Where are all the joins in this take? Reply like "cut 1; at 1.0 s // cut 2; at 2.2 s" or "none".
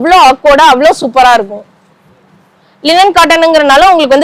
none